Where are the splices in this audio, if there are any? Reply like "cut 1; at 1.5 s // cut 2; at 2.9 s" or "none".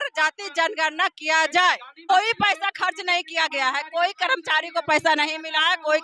cut 1; at 2.1 s